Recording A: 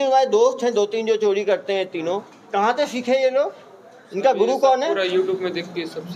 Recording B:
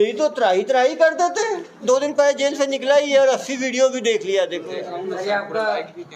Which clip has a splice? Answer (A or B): B